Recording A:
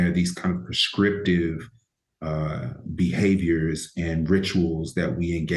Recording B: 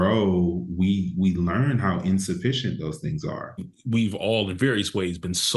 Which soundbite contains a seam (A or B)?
B